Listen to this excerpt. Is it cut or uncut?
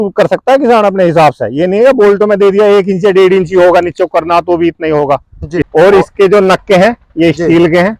cut